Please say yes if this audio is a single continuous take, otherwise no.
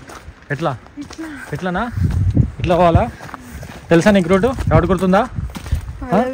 yes